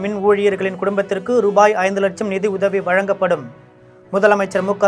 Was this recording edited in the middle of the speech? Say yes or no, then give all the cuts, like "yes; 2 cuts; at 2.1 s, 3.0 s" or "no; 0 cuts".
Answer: no; 0 cuts